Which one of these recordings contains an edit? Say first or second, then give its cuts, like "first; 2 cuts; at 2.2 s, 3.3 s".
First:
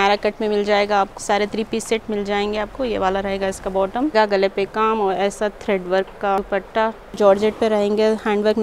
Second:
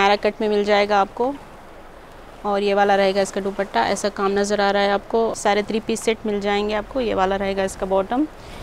first; 3 cuts; at 1.2 s, 4.1 s, 6.9 s